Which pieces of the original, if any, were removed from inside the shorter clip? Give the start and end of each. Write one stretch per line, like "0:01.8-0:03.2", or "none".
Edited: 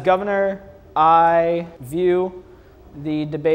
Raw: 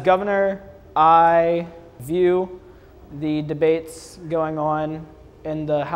0:01.8-0:01.9